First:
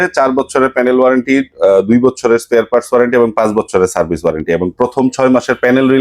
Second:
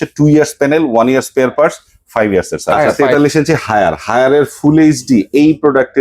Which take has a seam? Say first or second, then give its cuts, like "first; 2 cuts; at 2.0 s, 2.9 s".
second; 1 cut; at 3.0 s